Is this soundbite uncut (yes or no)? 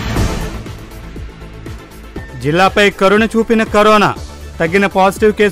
yes